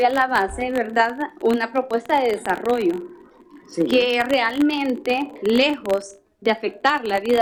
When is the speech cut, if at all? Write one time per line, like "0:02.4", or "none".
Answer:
none